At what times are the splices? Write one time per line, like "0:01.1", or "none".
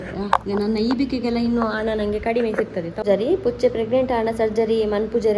0:03.0